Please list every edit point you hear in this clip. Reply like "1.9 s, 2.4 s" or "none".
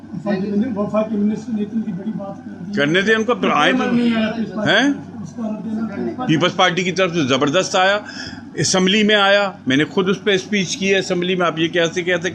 10.6 s